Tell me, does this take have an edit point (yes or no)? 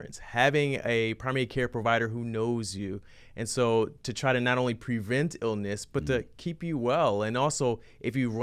no